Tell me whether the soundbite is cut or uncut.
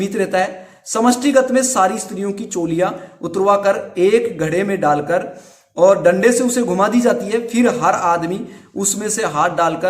uncut